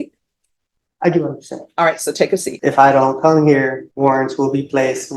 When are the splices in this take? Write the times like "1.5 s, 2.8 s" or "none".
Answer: 2.5 s, 3.8 s